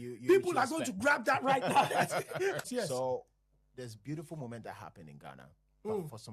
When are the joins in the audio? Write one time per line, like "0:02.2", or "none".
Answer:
0:02.7